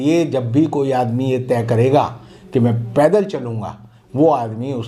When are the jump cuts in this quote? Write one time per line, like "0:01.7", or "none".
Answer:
none